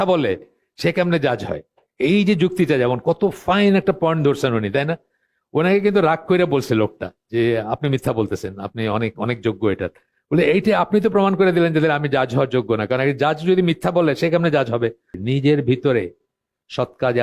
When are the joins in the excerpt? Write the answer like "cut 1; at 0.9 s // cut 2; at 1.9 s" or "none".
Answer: cut 1; at 15.1 s